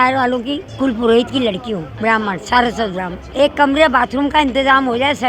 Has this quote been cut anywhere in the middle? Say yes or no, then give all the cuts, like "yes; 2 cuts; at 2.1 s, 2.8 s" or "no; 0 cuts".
yes; 1 cut; at 3.2 s